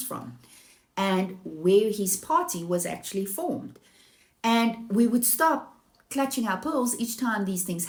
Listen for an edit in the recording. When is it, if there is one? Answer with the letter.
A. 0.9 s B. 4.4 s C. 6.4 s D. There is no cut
D